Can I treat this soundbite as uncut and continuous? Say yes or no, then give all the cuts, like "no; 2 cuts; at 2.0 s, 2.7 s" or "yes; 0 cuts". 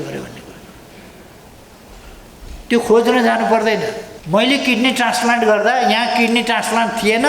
no; 1 cut; at 4.1 s